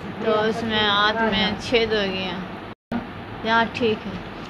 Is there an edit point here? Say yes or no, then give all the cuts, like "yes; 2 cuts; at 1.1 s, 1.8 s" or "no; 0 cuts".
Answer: yes; 1 cut; at 2.9 s